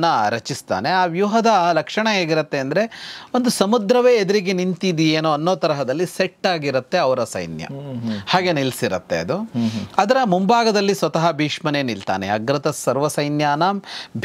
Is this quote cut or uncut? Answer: uncut